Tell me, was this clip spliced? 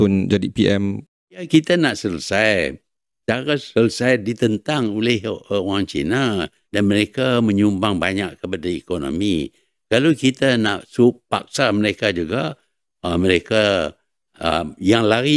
yes; 2 cuts; at 1.4 s, 6.6 s

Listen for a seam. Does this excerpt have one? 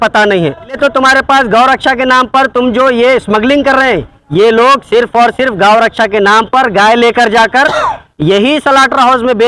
yes; 2 cuts; at 0.8 s, 4.1 s

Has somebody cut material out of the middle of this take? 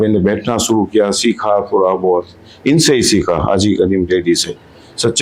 no; 0 cuts

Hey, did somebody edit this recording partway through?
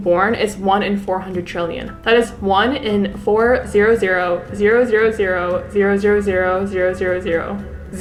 no; 0 cuts

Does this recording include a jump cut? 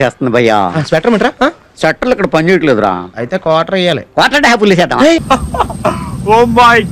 no; 0 cuts

